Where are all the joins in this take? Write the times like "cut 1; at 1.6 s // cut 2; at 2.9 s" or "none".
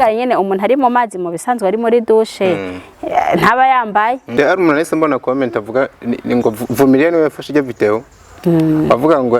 cut 1; at 4.2 s